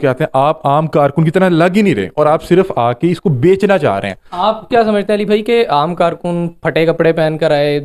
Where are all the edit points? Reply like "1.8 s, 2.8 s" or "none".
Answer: none